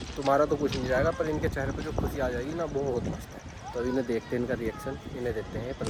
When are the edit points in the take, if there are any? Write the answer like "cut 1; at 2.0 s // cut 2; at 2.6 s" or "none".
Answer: none